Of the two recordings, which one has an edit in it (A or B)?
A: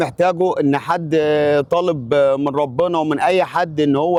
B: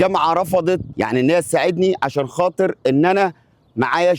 B